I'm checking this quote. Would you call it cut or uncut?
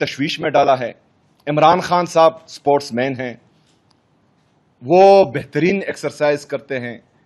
uncut